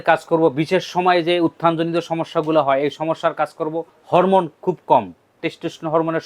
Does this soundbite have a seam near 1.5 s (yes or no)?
no